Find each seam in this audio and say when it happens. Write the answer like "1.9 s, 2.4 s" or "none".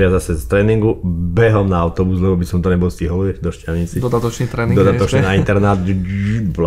none